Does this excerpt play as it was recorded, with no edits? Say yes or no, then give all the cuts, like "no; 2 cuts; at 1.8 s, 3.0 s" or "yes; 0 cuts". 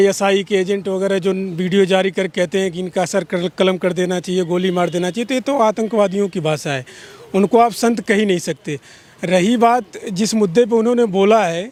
yes; 0 cuts